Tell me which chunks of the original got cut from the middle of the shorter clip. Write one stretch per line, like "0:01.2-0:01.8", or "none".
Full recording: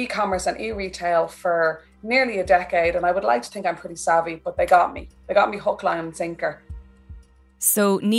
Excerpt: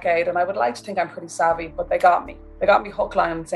none